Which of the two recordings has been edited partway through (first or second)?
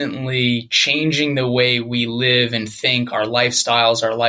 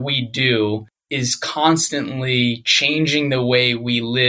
second